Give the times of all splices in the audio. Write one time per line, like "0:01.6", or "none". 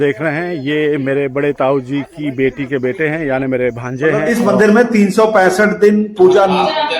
0:04.2